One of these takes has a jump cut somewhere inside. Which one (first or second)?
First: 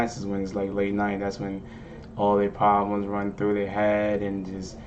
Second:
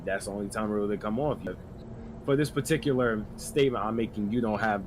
second